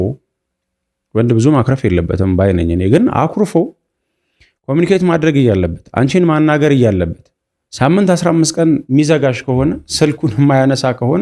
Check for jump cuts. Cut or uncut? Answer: uncut